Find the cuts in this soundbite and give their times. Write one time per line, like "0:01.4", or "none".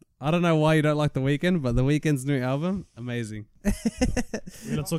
0:03.4

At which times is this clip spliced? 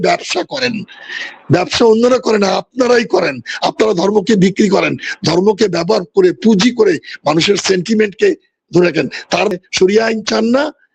0:09.5

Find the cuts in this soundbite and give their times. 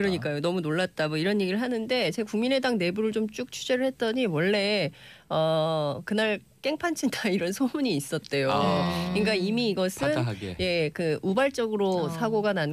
0:10.4

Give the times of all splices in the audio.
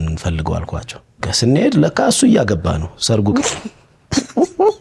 0:01.3

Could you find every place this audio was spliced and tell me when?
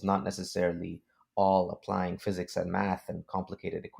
none

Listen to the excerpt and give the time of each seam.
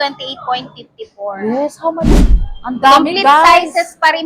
0:02.1

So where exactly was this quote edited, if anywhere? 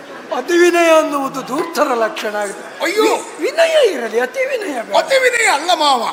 none

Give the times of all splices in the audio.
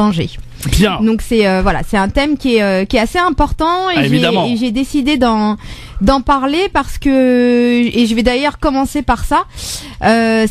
0:07.4

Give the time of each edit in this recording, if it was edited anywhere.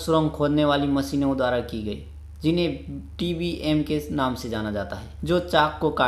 0:05.0

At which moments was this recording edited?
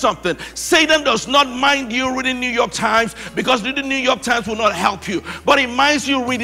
none

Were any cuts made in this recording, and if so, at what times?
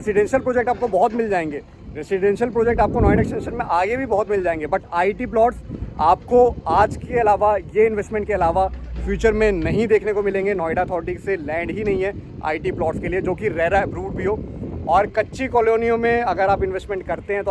none

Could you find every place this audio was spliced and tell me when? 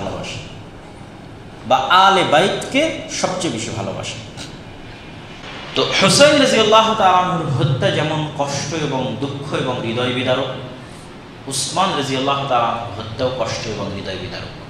0:05.4

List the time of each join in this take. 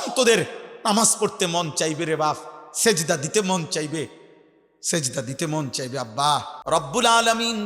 0:06.5

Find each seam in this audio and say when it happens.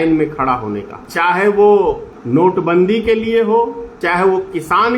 0:01.0
0:02.1
0:03.9

